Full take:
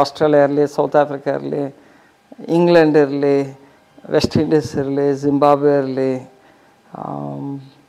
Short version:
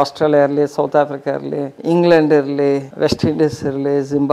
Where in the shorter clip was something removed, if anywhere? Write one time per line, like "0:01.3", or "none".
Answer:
0:01.7
0:02.9